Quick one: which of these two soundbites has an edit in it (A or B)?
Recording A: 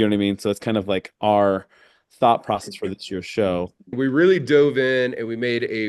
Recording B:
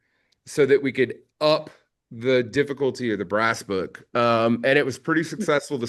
A